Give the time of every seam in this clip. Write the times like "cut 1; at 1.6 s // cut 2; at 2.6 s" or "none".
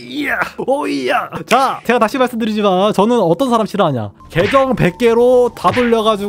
cut 1; at 1.8 s